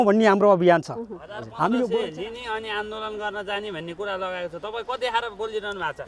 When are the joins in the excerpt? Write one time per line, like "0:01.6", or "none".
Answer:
0:01.9